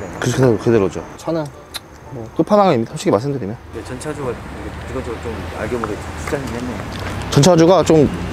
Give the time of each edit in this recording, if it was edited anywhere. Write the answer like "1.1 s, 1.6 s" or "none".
1.1 s, 3.7 s